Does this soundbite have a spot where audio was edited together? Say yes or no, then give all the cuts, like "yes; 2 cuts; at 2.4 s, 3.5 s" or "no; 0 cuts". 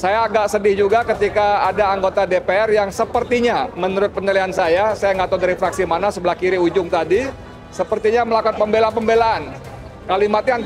no; 0 cuts